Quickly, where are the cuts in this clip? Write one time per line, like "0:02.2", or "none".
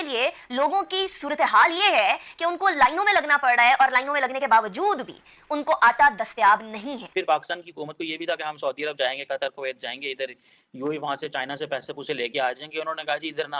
0:07.1